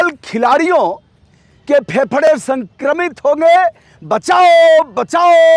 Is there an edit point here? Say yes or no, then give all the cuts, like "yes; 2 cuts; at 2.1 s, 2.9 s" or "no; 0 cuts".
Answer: no; 0 cuts